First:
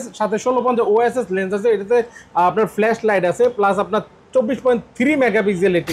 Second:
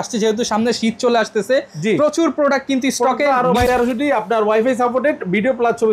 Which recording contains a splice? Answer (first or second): second